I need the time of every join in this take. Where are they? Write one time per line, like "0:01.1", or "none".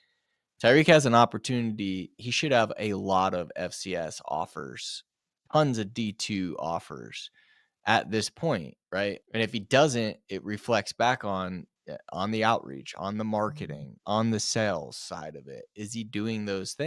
0:02.2
0:09.2
0:14.0